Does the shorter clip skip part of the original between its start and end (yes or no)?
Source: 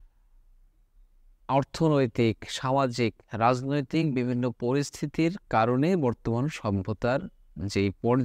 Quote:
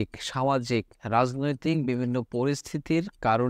no